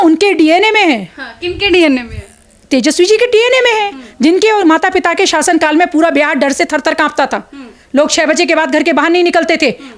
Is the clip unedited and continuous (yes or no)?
yes